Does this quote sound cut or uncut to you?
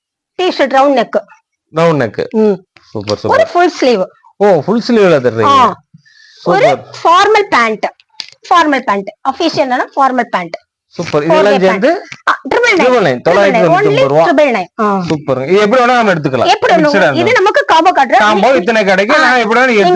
uncut